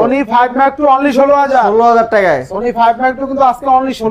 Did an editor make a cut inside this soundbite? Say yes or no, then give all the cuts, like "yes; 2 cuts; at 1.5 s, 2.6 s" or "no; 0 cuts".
no; 0 cuts